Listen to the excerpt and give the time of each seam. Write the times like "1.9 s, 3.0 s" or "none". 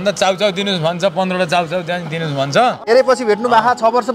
2.8 s

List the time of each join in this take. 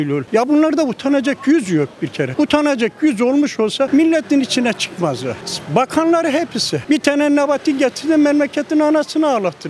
none

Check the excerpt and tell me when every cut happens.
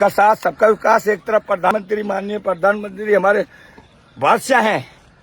1.7 s

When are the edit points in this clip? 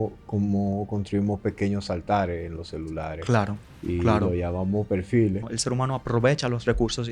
5.4 s

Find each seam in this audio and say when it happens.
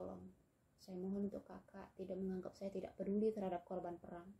none

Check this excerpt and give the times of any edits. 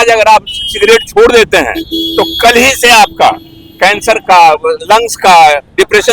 none

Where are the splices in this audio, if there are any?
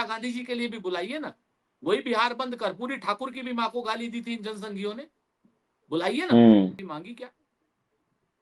6.8 s

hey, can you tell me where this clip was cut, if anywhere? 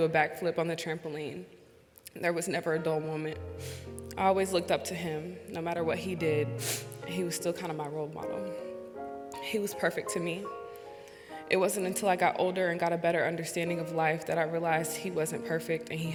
none

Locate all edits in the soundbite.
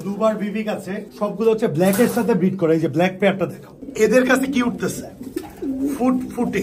1.0 s, 3.8 s

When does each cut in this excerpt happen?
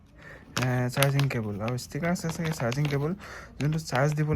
none

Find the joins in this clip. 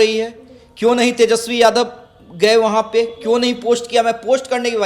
none

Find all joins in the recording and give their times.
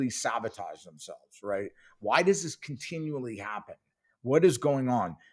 none

